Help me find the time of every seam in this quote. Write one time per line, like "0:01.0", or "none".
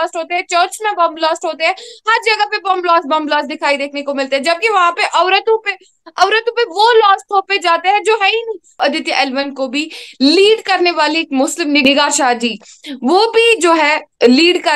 0:08.8
0:11.8